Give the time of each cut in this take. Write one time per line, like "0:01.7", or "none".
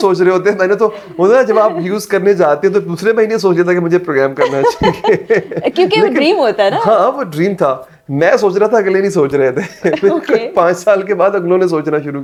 none